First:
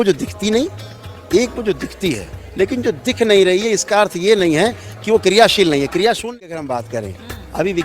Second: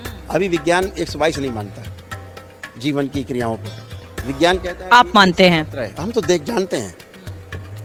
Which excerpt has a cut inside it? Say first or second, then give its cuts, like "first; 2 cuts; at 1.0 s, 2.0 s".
first; 1 cut; at 6.2 s